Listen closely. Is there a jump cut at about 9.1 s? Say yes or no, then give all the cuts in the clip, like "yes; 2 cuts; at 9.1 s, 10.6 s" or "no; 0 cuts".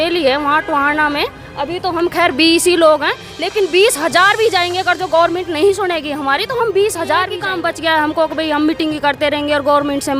no; 1 cut; at 7.6 s